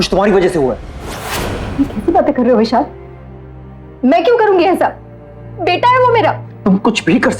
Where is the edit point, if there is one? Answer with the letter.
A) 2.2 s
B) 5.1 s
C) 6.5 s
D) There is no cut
C